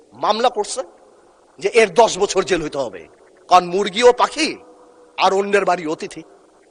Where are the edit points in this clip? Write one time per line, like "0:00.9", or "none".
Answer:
none